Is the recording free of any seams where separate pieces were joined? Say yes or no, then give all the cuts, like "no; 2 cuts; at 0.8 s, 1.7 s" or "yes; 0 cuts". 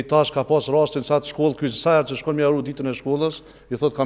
yes; 0 cuts